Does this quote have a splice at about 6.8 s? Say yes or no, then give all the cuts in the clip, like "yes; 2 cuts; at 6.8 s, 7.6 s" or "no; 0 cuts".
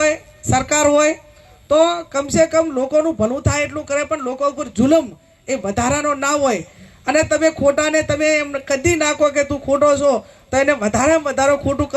yes; 1 cut; at 6.8 s